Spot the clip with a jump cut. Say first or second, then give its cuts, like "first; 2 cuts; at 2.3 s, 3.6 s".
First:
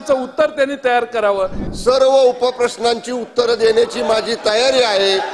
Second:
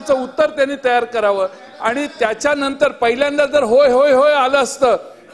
first; 1 cut; at 1.6 s